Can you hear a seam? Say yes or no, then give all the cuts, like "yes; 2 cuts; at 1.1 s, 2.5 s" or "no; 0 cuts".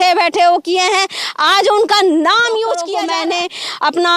yes; 1 cut; at 2.9 s